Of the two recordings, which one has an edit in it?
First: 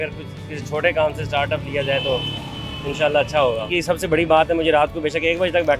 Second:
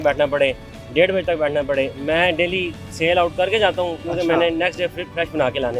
first; 1 cut; at 3.7 s

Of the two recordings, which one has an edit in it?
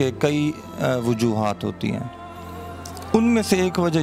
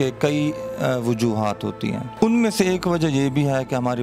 second; 1 cut; at 2.1 s

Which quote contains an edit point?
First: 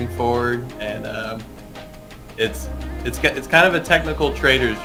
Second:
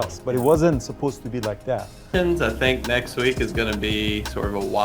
second; 1 cut; at 2.1 s

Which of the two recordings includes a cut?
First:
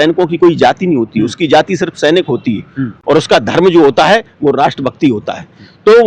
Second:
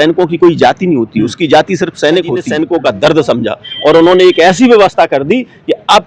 second; 1 cut; at 2.5 s

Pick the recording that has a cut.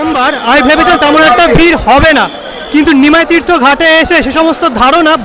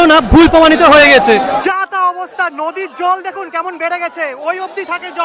second; 1 cut; at 1.6 s

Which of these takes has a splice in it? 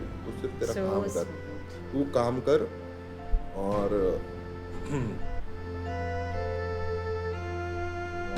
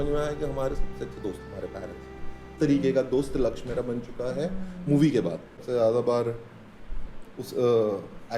second; 2 cuts; at 2.5 s, 5.5 s

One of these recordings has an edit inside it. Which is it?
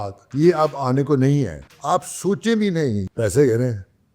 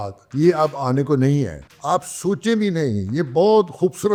first; 1 cut; at 3.1 s

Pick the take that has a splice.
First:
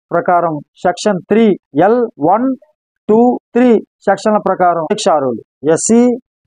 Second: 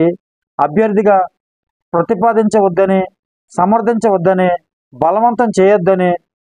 first; 3 cuts; at 2.1 s, 3.4 s, 5.2 s

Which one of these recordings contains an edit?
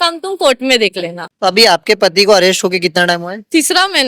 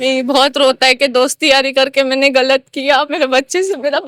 first; 1 cut; at 1.2 s

